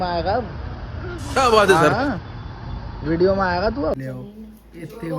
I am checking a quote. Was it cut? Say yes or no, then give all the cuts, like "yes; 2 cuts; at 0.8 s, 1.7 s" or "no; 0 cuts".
yes; 1 cut; at 4.0 s